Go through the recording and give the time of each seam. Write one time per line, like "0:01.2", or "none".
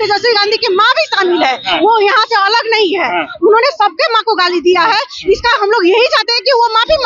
none